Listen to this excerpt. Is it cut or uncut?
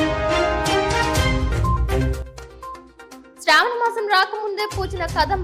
cut